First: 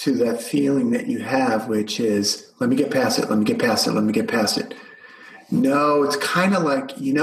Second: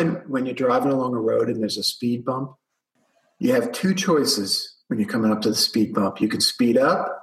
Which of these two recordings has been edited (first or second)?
second